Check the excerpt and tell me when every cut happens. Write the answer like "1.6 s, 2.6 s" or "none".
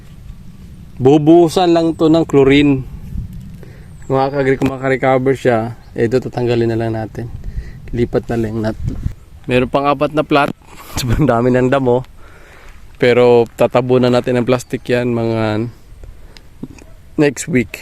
8.9 s